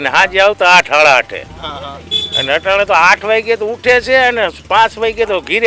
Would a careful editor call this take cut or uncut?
uncut